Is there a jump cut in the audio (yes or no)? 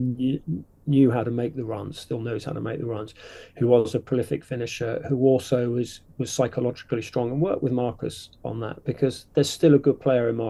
no